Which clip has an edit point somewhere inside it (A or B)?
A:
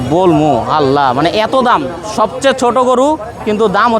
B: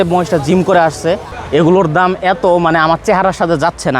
B